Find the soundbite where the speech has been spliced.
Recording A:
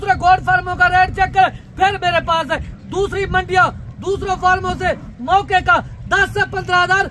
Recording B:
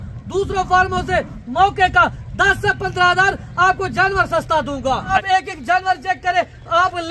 B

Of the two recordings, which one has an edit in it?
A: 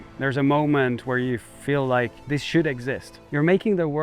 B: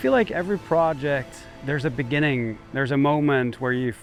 A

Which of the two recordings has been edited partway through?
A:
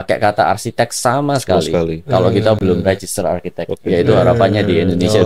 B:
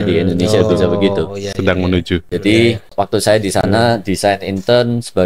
B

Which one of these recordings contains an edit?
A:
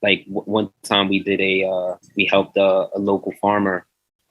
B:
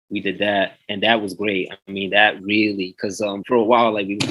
B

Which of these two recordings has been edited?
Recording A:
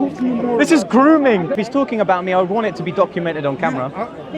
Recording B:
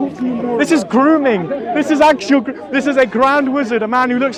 A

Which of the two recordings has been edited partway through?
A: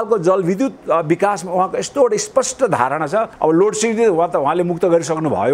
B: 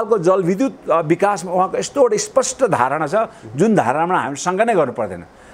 A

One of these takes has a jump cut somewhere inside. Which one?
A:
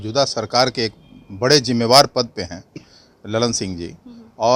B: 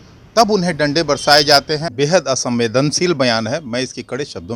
B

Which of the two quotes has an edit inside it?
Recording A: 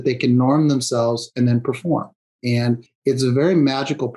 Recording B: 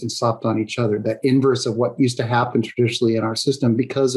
A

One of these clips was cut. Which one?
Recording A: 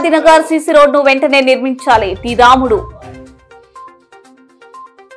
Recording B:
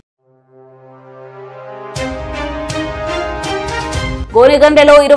B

